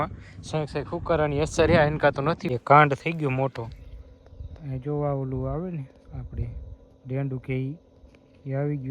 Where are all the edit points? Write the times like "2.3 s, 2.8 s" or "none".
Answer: 2.5 s